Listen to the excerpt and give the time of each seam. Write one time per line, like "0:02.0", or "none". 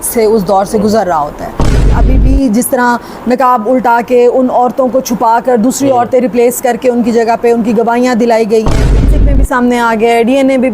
0:02.0
0:09.1